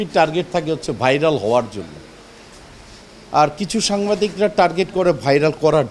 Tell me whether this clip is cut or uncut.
uncut